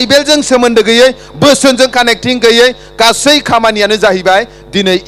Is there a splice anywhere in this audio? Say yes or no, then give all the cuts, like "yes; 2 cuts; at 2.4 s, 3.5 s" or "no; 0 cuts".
no; 0 cuts